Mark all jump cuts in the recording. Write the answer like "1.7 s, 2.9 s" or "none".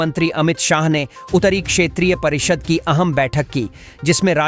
none